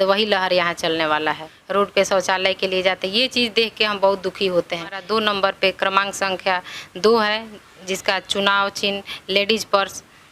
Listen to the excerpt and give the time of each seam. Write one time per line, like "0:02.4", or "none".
0:01.5
0:05.0